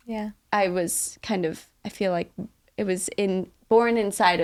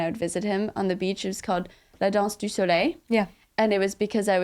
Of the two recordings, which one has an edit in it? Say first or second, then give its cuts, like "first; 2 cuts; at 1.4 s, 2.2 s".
second; 2 cuts; at 1.9 s, 3.4 s